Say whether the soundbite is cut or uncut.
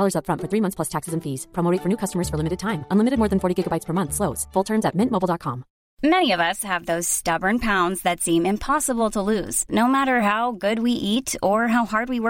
cut